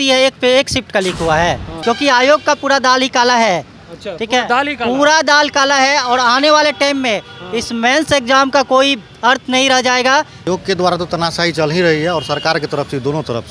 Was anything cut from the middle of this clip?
yes; 2 cuts; at 1.7 s, 10.5 s

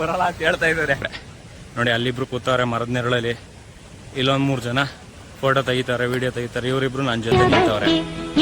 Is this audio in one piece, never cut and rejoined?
no; 1 cut; at 1.1 s

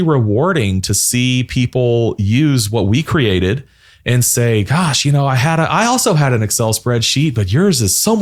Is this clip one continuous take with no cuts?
yes; 0 cuts

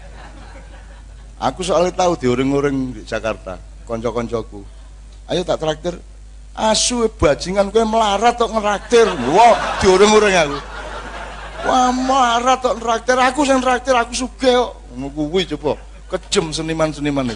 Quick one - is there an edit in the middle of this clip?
no; 0 cuts

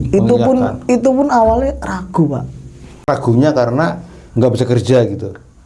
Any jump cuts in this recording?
yes; 1 cut; at 3.1 s

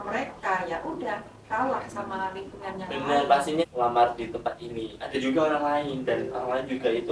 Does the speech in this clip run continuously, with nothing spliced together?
no; 1 cut; at 3.6 s

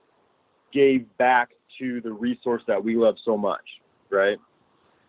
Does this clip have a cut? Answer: no; 0 cuts

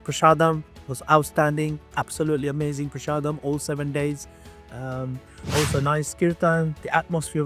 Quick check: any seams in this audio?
no; 0 cuts

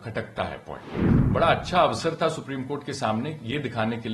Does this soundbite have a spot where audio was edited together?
yes; 1 cut; at 1.1 s

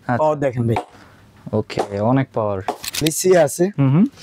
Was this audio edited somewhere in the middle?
yes; 1 cut; at 3.0 s

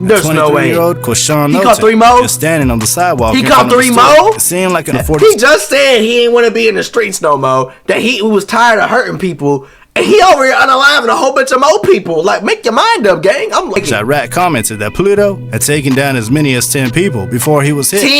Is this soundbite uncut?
no; 2 cuts; at 5.0 s, 13.8 s

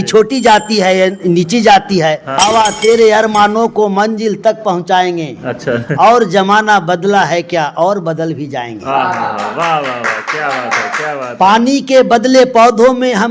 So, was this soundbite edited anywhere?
yes; 1 cut; at 2.4 s

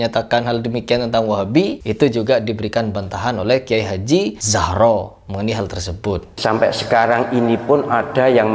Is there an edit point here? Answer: yes; 3 cuts; at 1.8 s, 4.4 s, 6.3 s

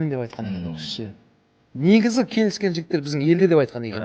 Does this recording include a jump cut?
no; 0 cuts

